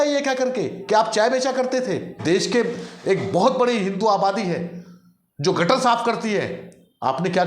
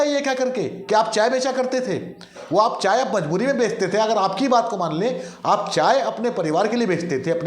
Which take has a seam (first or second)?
first